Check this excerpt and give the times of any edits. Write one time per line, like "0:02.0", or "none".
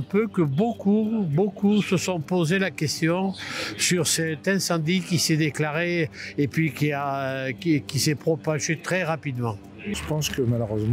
0:09.9